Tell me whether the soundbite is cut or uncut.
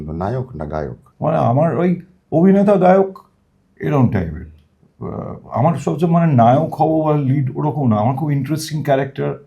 cut